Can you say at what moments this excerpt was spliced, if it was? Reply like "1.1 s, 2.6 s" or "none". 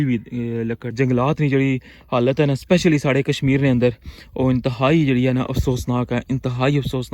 0.9 s